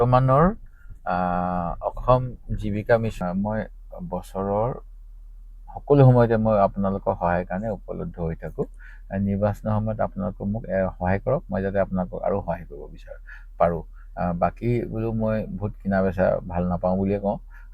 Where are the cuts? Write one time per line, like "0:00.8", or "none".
0:03.2